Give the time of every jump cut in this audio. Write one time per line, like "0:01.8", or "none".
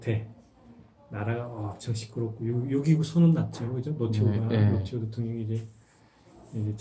none